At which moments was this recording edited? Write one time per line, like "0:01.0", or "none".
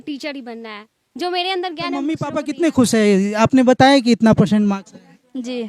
0:02.1